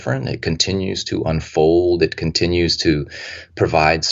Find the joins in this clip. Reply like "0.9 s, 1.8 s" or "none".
none